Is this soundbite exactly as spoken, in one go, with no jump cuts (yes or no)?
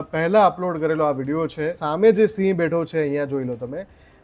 no